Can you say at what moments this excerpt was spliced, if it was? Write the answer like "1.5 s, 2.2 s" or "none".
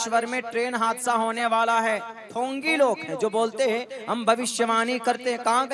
2.2 s